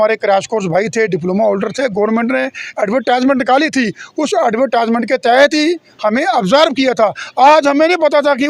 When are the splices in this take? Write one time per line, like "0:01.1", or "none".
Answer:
none